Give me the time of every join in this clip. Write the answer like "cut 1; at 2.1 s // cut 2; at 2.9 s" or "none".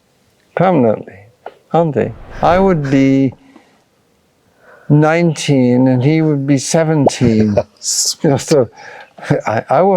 cut 1; at 2.2 s